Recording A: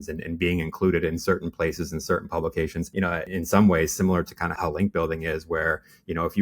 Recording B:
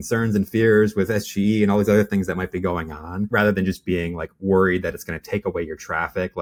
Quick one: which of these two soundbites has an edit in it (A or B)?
A